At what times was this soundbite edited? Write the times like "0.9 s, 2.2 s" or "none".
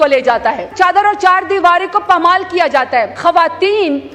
0.7 s, 3.1 s